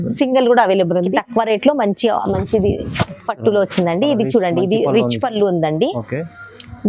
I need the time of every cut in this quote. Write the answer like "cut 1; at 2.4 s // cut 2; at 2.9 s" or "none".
cut 1; at 1.1 s

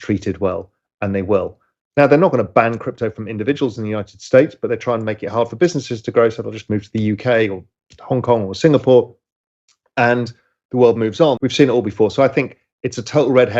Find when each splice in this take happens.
cut 1; at 11.4 s

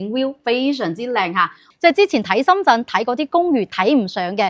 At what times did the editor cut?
cut 1; at 1.7 s

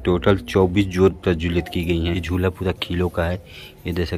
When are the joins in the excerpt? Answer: cut 1; at 2.2 s

